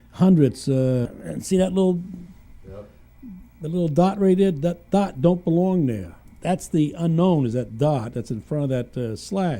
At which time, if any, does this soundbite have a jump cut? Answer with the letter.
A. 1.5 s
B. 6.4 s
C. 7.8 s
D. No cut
C